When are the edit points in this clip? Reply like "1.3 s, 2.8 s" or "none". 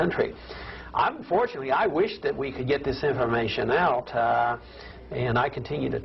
none